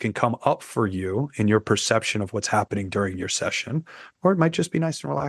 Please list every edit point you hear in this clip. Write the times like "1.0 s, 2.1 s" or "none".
none